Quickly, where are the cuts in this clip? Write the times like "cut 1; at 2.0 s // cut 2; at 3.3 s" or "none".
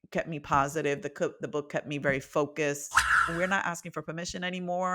cut 1; at 3.2 s